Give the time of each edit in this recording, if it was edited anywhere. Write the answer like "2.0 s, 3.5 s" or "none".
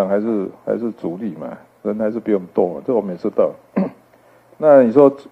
none